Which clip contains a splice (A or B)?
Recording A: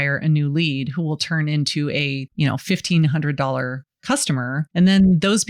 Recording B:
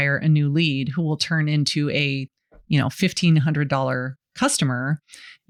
A